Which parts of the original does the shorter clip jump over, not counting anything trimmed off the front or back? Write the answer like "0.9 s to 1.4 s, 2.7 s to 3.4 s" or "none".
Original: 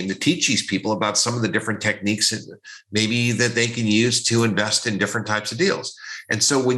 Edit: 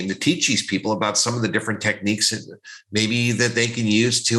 none